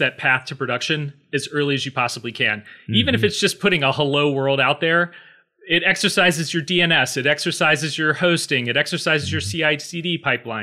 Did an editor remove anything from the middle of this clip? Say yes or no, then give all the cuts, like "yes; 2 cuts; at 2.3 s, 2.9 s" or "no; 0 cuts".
no; 0 cuts